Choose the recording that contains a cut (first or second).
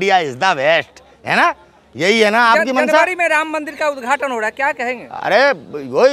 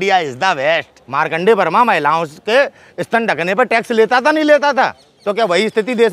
second